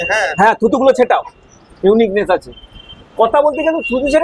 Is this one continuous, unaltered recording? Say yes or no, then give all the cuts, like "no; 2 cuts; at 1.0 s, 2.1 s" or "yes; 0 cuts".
yes; 0 cuts